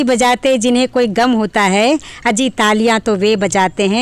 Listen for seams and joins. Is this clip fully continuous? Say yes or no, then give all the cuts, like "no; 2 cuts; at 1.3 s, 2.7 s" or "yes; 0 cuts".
yes; 0 cuts